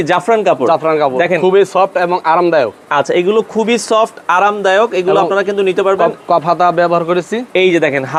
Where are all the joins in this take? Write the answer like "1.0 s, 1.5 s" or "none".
none